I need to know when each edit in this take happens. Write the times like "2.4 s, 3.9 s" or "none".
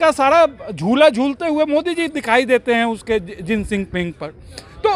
none